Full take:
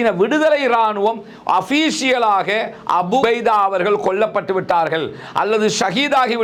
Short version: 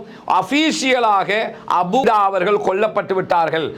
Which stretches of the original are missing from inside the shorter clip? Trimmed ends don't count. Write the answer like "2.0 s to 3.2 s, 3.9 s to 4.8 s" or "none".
3.2 s to 3.4 s